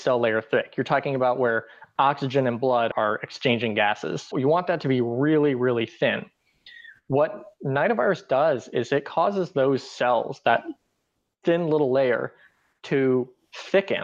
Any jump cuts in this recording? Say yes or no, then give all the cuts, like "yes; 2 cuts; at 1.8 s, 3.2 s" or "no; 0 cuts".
yes; 2 cuts; at 2.9 s, 4.3 s